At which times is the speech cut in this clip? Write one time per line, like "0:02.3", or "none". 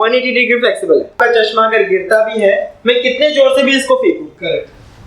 0:01.1